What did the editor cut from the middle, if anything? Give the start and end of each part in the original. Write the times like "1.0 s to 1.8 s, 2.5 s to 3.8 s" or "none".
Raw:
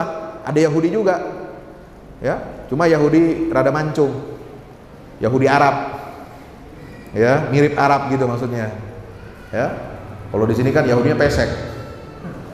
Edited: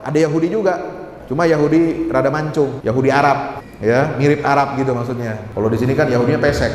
1.6 s to 2.6 s, 4.2 s to 5.1 s, 6.0 s to 7.0 s, 8.7 s to 10.2 s